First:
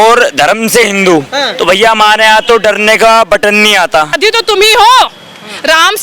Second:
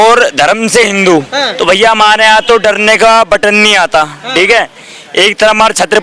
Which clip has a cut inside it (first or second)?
first